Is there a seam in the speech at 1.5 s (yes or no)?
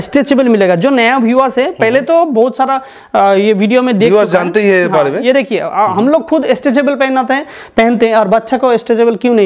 no